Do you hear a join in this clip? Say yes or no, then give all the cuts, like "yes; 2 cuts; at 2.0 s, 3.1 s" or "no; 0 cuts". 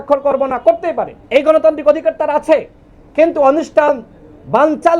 yes; 1 cut; at 1.1 s